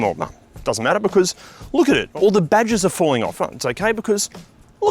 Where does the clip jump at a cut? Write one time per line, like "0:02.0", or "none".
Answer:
0:02.1

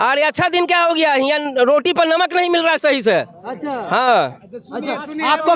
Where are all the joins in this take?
none

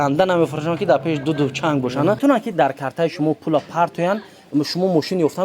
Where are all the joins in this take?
0:02.2

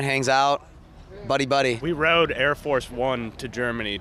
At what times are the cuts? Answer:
0:01.8

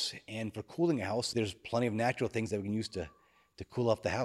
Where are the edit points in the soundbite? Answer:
0:01.3

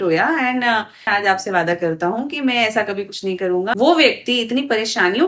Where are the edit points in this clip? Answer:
0:01.1
0:03.7

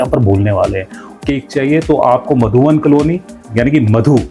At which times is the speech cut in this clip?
0:01.0

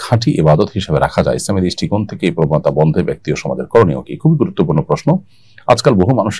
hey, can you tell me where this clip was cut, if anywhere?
none

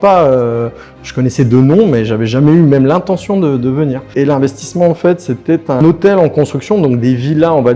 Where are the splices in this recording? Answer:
0:04.1
0:05.8

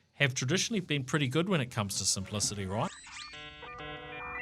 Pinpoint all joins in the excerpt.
0:03.5

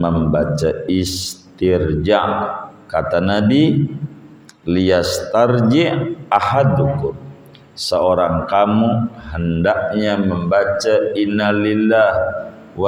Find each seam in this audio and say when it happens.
none

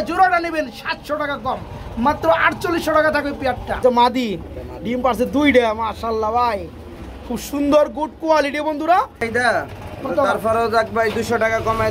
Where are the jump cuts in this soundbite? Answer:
0:03.8
0:09.5

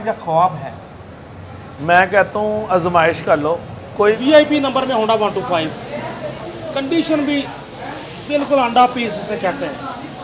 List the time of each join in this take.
0:04.2

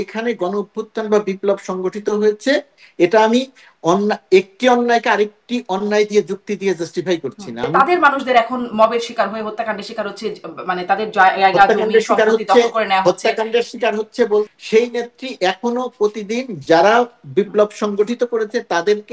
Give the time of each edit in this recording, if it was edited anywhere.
0:07.7
0:14.5

